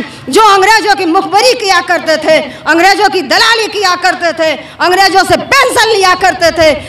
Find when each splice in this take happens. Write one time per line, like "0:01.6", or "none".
none